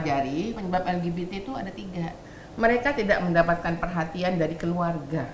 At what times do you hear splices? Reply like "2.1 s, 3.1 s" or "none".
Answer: 2.2 s